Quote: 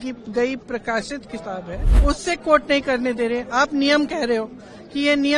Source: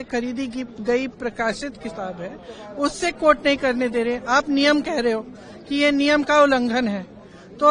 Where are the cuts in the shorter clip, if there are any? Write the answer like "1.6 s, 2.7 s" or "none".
1.8 s